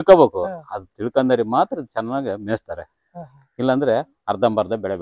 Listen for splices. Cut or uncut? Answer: uncut